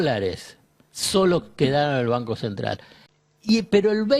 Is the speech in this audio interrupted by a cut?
yes; 1 cut; at 2.9 s

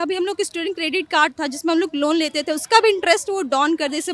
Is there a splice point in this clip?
no; 0 cuts

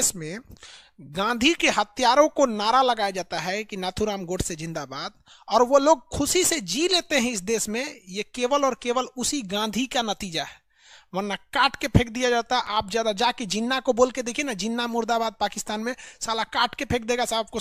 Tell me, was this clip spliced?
no; 0 cuts

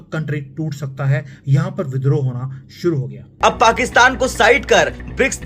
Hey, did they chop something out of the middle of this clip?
yes; 1 cut; at 3.2 s

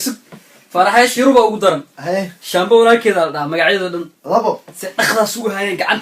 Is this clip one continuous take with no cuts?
no; 1 cut; at 2.6 s

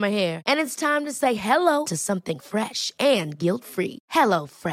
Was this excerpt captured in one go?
yes; 0 cuts

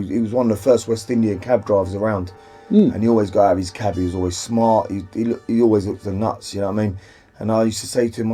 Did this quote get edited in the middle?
no; 0 cuts

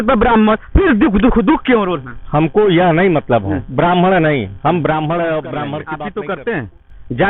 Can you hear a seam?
yes; 1 cut; at 5.9 s

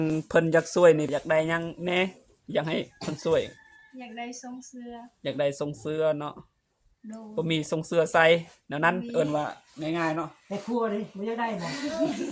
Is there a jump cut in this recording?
yes; 1 cut; at 1.1 s

